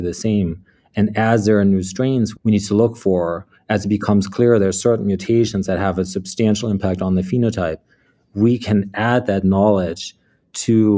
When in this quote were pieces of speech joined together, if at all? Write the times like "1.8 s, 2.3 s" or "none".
2.3 s